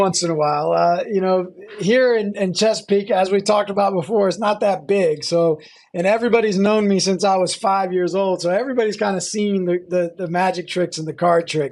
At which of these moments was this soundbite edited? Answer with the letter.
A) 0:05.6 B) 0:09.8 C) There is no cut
C